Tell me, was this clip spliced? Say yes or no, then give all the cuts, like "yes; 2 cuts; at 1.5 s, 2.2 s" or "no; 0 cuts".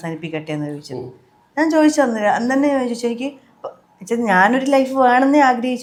no; 0 cuts